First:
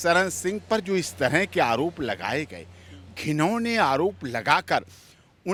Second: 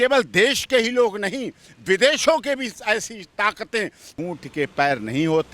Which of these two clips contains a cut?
second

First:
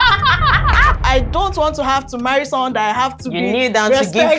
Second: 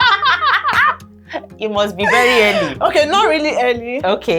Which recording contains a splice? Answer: first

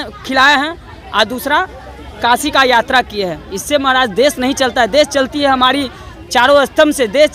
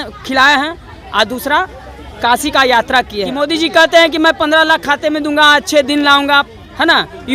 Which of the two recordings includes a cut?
second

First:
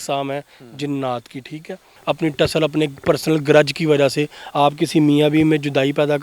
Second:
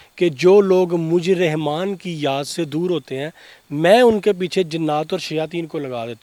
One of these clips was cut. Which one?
first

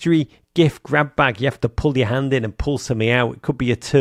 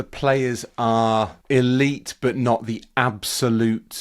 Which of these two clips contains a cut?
second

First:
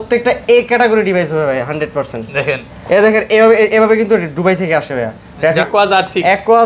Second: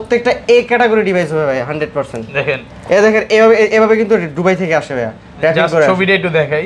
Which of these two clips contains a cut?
first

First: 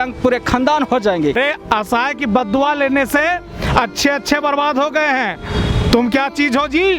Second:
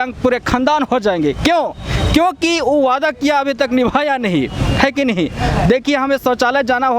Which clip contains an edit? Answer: first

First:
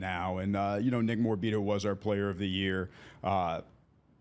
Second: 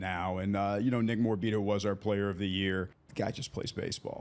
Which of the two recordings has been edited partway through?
second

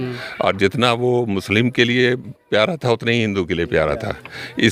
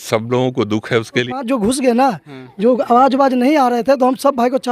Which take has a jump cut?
second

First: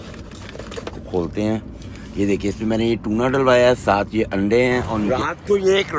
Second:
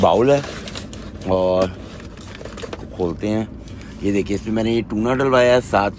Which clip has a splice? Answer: first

